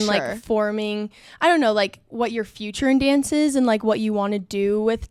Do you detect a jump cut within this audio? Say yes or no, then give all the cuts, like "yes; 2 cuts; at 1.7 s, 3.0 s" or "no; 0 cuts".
no; 0 cuts